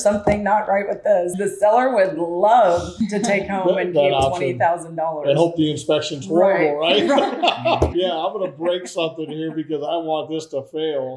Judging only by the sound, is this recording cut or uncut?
cut